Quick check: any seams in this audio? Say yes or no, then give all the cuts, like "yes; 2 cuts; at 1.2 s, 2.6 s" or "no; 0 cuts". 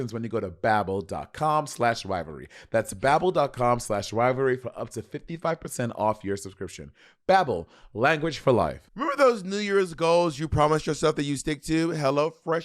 yes; 1 cut; at 8.9 s